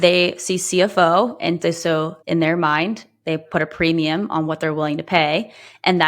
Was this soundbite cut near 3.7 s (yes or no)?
no